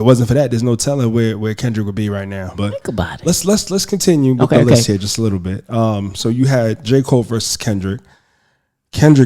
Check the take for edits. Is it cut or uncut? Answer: cut